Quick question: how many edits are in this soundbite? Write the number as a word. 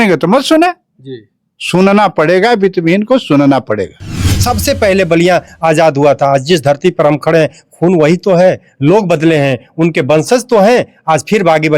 one